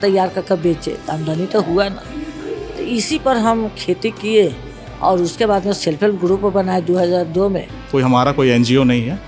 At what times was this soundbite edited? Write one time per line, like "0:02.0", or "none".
0:07.8